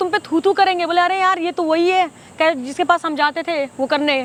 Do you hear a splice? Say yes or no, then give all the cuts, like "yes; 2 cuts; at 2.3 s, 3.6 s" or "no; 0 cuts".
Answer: no; 0 cuts